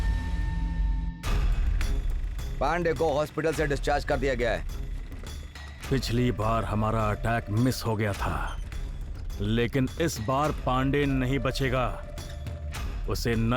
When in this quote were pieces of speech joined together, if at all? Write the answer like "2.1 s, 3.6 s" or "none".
1.2 s